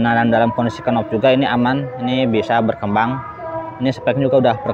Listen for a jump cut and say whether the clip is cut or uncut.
uncut